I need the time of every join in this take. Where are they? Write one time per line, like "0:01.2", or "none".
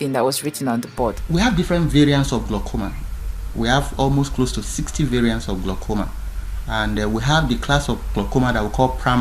0:01.2

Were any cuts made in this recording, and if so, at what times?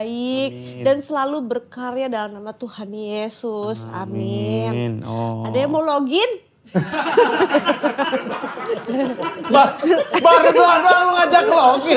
none

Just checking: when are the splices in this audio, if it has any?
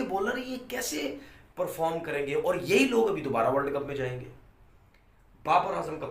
none

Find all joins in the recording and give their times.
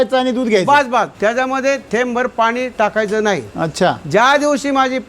0:01.1

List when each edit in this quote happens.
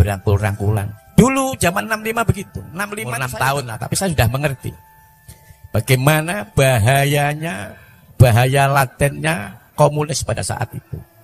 0:01.0
0:03.0

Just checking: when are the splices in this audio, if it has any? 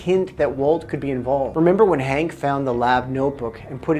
0:01.5

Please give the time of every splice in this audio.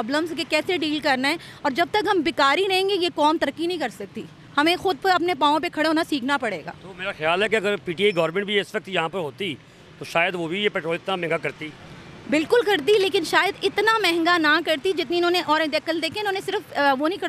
none

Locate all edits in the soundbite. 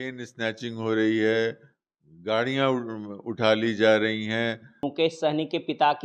0:04.8

